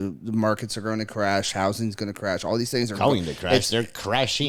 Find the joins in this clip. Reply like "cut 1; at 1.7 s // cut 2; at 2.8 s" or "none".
none